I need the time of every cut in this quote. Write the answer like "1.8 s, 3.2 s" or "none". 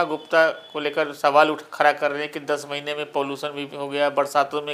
none